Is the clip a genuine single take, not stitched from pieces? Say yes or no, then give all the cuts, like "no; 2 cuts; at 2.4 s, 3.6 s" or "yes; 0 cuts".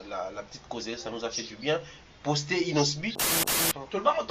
no; 1 cut; at 3.3 s